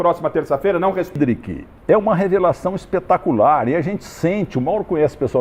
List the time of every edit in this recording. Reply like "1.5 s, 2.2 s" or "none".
1.2 s

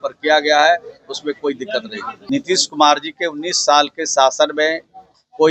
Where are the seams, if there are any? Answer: 2.1 s

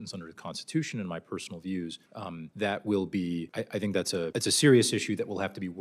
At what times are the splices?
2.3 s, 3.5 s, 4.3 s

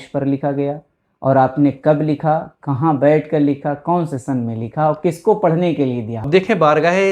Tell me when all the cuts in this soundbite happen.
6.1 s

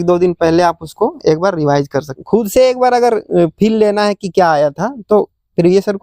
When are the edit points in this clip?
2.2 s

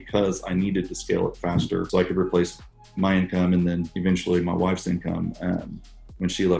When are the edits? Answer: 1.9 s, 3.9 s

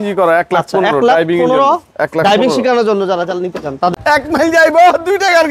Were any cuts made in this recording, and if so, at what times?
3.9 s

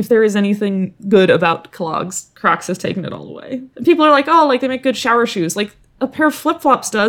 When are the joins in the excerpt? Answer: 0.9 s, 2.2 s, 3.7 s

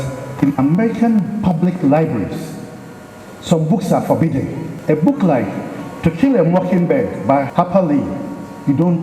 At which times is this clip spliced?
4.7 s, 7.5 s

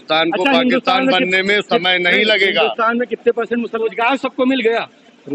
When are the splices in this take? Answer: 3.8 s

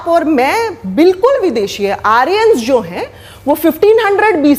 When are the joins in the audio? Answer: none

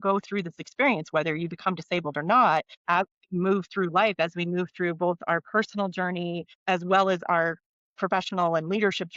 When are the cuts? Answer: 2.7 s, 6.5 s

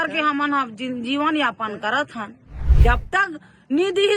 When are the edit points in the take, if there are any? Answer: 2.6 s

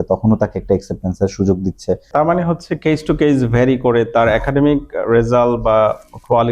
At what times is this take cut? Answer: 2.0 s

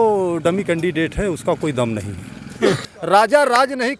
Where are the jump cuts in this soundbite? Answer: 2.8 s

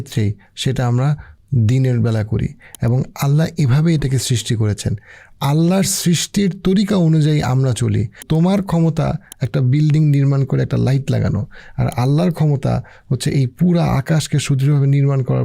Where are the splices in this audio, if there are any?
1.3 s, 8.2 s

